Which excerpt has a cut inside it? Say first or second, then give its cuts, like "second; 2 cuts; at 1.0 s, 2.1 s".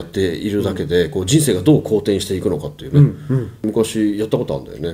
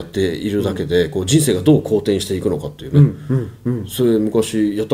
first; 1 cut; at 3.6 s